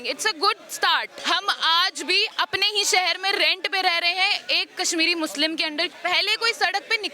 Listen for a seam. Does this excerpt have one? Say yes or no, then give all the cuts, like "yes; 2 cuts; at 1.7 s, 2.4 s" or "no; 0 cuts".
yes; 2 cuts; at 1.1 s, 5.9 s